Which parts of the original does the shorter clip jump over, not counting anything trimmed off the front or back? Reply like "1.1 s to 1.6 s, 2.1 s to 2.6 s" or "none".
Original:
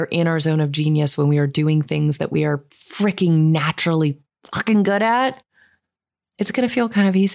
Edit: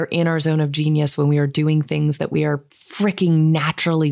none